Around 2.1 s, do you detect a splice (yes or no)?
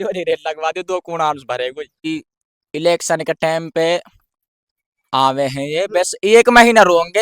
yes